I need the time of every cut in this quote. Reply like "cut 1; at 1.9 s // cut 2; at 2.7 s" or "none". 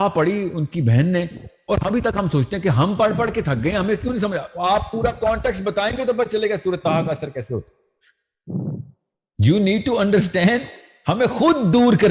none